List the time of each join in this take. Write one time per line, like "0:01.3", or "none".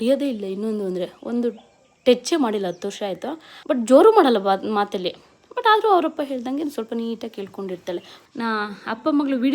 0:03.5
0:08.1